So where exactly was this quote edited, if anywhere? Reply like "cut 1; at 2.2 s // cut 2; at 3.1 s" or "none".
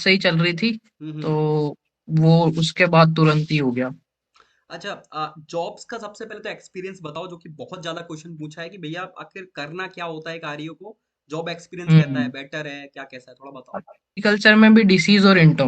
cut 1; at 14.2 s